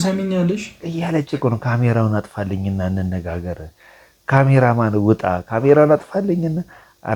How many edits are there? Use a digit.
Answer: 0